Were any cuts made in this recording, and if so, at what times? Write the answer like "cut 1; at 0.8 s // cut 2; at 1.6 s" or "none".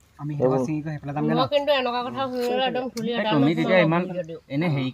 none